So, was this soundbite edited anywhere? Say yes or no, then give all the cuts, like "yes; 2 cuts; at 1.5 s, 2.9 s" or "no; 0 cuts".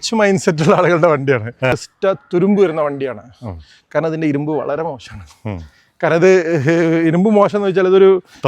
yes; 1 cut; at 1.9 s